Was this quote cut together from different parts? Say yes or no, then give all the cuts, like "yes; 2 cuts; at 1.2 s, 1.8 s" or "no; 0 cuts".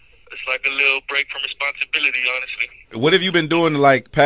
yes; 1 cut; at 2.9 s